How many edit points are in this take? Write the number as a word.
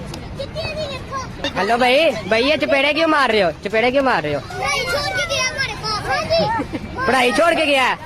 one